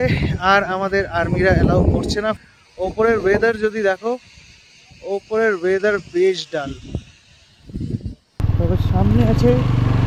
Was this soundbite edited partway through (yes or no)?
yes